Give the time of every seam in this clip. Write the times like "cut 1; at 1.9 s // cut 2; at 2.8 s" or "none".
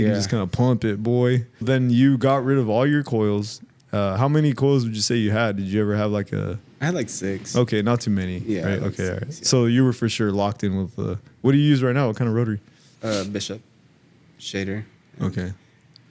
none